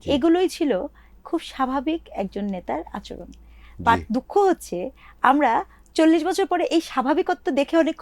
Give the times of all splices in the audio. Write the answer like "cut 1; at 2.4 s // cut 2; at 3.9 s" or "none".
none